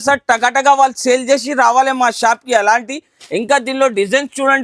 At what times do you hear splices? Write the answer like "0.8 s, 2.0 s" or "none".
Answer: none